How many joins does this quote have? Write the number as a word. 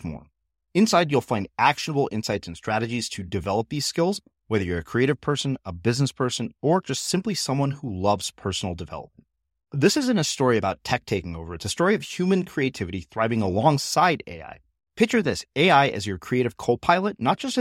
zero